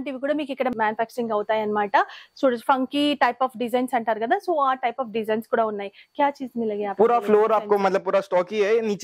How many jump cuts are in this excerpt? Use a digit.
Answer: 0